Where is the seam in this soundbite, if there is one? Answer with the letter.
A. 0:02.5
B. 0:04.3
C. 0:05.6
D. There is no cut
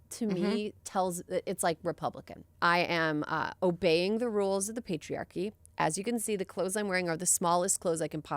A